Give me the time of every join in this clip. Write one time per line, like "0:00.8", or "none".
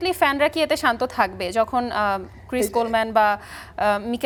none